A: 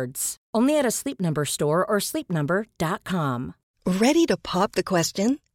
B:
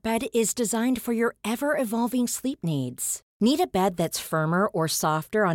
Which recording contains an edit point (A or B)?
A